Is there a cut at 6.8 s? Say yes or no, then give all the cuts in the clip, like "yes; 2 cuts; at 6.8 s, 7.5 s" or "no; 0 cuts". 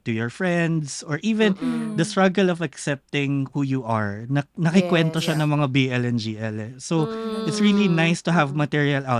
no; 0 cuts